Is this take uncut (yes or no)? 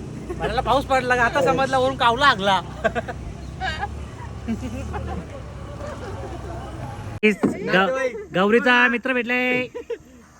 no